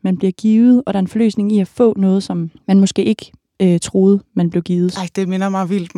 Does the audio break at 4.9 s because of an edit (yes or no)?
yes